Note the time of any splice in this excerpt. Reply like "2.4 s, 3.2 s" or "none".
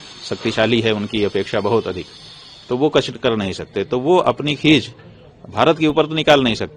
none